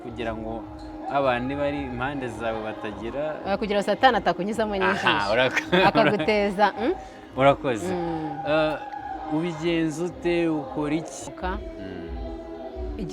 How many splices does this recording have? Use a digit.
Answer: 1